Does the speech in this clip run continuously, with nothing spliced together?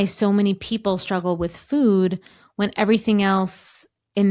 yes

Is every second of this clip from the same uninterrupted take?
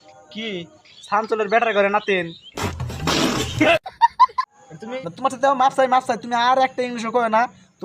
no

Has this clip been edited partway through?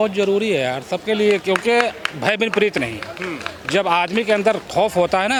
no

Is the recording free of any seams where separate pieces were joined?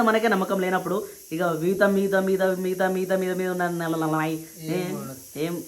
yes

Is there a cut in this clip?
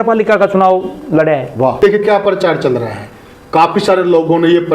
yes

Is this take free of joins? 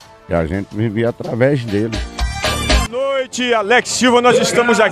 no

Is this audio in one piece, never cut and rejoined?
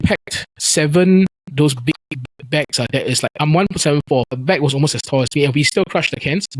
yes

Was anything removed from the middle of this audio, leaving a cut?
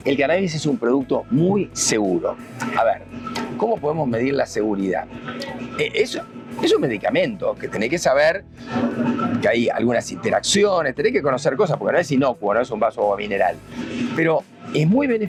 no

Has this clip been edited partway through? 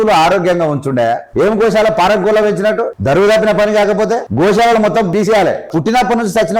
yes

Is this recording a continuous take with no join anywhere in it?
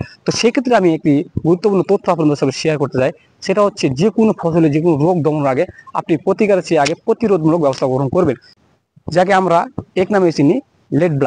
no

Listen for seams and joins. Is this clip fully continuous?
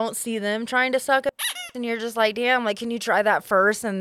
yes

